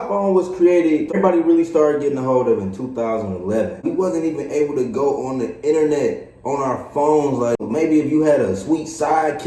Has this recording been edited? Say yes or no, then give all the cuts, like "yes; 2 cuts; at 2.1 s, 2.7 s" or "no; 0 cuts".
yes; 3 cuts; at 1.2 s, 3.8 s, 7.6 s